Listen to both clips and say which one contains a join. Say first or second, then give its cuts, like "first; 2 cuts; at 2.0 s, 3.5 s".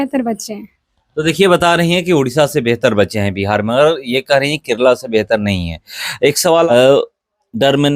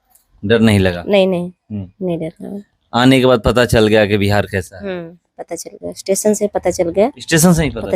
first; 1 cut; at 6.7 s